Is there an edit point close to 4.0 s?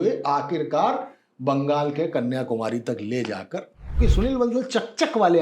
yes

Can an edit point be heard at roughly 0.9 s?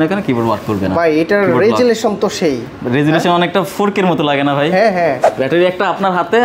no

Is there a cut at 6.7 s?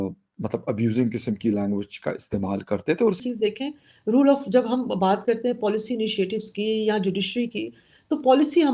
no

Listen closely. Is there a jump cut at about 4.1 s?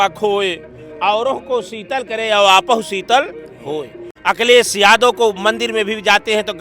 yes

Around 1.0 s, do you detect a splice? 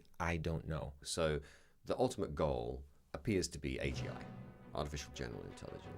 yes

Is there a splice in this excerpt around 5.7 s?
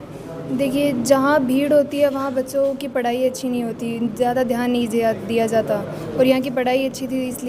no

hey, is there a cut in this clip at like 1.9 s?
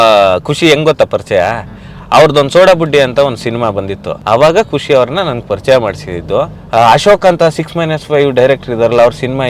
no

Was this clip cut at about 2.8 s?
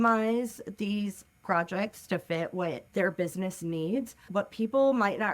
yes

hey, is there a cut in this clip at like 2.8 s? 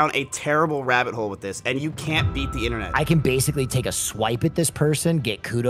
yes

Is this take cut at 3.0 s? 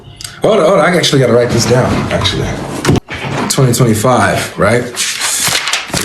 yes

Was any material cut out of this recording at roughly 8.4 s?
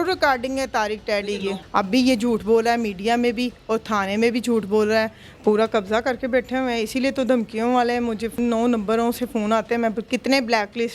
yes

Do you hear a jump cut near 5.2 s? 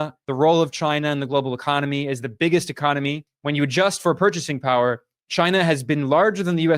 no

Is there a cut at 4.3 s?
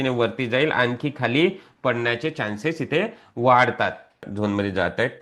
yes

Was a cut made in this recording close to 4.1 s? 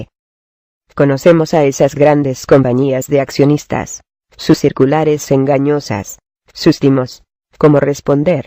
no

